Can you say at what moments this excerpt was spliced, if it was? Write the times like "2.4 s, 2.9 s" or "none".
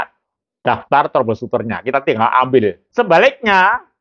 2.8 s